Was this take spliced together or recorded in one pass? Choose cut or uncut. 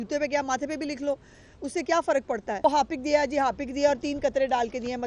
cut